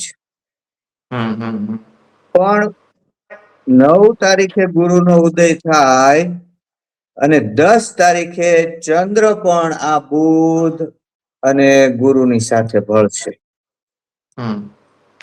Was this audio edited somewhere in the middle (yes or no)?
no